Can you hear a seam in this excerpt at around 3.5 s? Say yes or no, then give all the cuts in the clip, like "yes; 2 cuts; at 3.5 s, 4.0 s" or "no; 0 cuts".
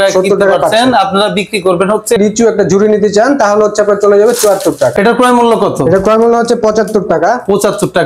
no; 2 cuts; at 2.2 s, 4.9 s